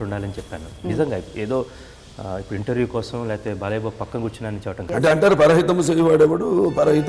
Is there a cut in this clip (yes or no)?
yes